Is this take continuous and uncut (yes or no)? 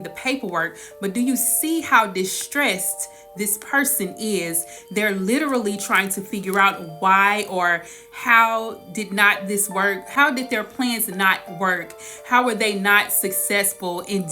no